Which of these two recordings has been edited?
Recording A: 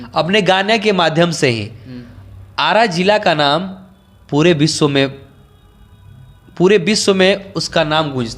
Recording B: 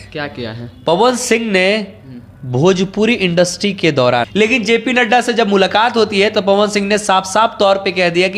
B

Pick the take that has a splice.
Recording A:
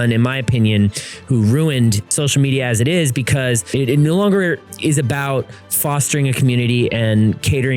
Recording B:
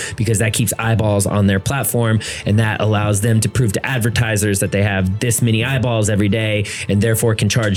A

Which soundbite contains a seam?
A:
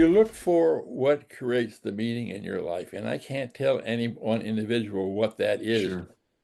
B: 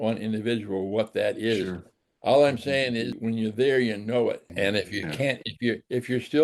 B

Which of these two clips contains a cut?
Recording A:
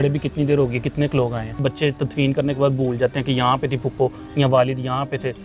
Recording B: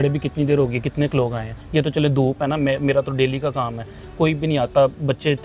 A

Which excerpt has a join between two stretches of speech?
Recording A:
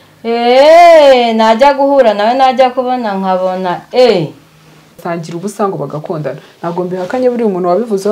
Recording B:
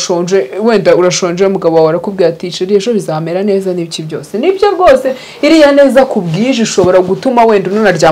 A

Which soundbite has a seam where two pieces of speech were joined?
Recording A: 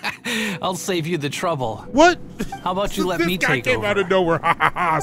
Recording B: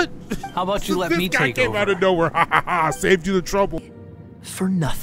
B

